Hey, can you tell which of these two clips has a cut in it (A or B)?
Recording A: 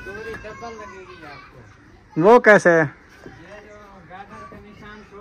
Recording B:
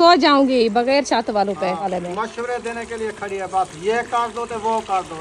B